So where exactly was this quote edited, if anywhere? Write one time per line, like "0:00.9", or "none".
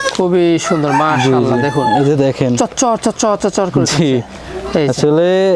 none

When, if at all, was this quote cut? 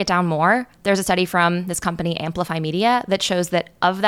none

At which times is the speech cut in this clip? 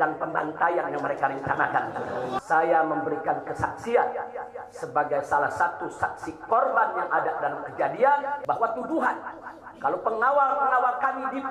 0:02.4
0:08.4

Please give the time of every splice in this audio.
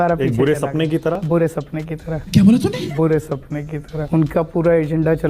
0:03.9

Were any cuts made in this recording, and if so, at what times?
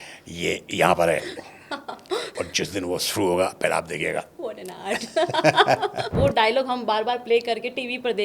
0:02.3
0:06.1

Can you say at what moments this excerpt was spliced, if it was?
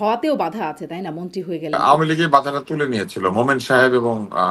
0:01.8

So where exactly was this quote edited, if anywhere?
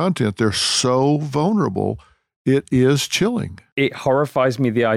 0:03.7

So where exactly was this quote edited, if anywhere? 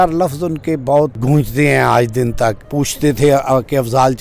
0:01.2
0:02.6

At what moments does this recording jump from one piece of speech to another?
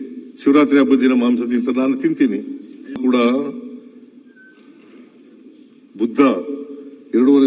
0:03.0

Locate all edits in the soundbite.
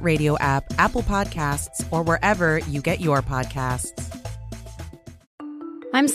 0:05.2

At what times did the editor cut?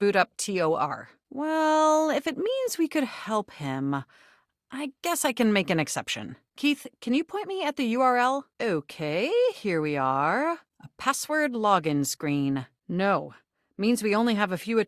0:01.2
0:06.3
0:08.5
0:12.7

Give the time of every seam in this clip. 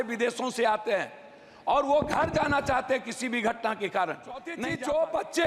0:04.6

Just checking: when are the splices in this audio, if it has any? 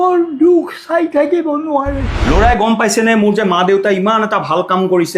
0:02.1

